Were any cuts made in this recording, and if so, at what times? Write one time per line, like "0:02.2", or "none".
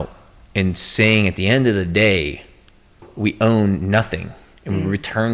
0:03.1

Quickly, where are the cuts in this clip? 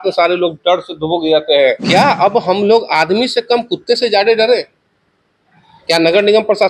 0:01.8

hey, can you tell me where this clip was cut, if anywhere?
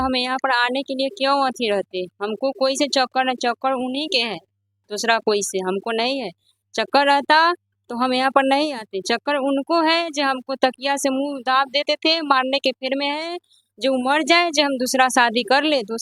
none

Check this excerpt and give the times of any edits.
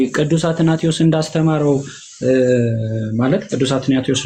none

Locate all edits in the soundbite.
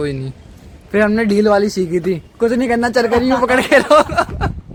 none

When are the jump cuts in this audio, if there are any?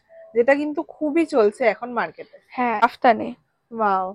0:02.8

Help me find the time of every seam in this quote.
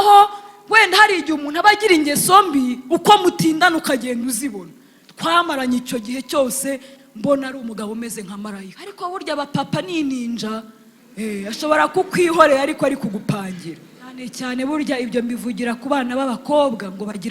0:08.8
0:14.3

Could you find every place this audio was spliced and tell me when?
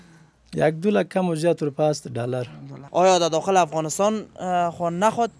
0:02.8

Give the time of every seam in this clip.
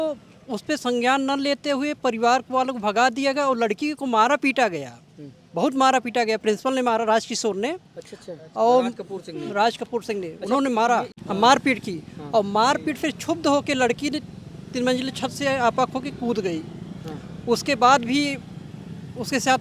0:11.1

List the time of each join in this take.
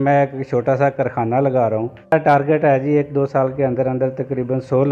0:02.1

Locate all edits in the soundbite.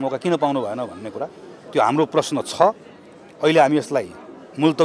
none

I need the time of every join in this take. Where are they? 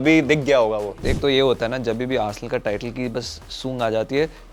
0:00.9

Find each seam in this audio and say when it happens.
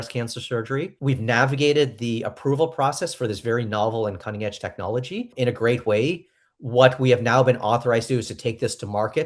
0:00.9
0:05.3

